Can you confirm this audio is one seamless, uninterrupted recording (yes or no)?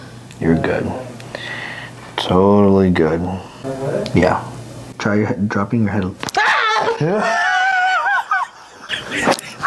yes